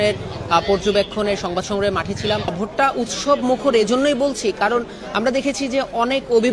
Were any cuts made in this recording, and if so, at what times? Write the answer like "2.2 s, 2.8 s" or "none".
2.5 s